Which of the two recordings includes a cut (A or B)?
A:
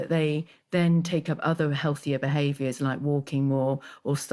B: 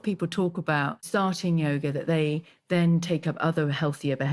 B